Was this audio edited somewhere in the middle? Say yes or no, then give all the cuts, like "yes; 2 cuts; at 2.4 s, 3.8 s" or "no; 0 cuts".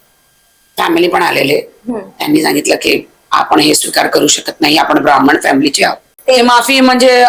yes; 1 cut; at 6.1 s